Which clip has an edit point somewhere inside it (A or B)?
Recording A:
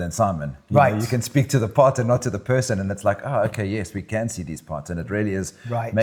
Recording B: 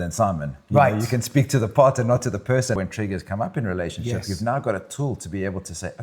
B